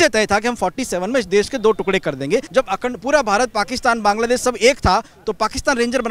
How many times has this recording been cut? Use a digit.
1